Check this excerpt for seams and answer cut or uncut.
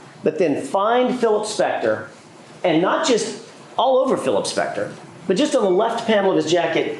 uncut